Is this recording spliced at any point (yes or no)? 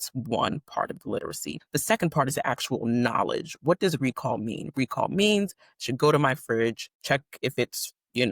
yes